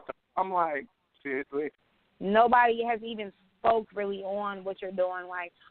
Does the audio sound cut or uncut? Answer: cut